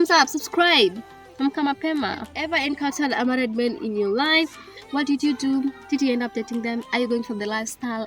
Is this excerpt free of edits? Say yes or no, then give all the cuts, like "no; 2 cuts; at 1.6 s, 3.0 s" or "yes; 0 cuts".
no; 1 cut; at 2.4 s